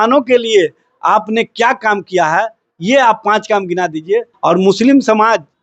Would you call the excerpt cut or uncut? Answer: cut